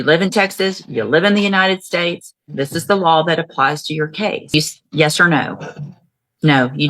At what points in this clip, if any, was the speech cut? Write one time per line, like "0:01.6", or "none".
0:04.5